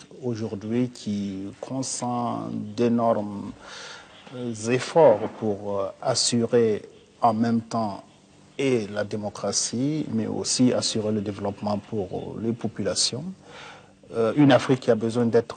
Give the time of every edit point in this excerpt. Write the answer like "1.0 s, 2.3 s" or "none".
none